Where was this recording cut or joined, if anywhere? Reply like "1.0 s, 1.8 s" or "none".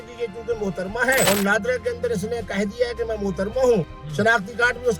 1.3 s